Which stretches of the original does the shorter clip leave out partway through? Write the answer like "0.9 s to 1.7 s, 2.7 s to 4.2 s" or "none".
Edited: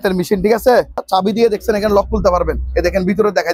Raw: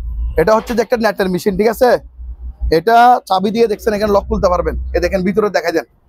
2.2 s to 3.2 s